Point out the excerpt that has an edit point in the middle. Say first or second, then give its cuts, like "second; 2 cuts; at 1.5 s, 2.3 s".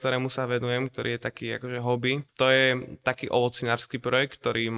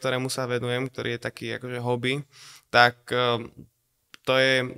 first; 1 cut; at 2.3 s